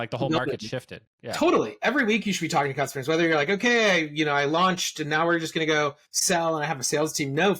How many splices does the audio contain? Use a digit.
1